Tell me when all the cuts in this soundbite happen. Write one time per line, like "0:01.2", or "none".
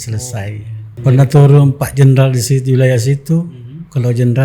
0:00.9